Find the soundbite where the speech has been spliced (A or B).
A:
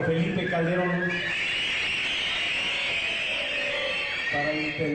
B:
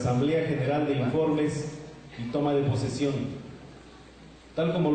B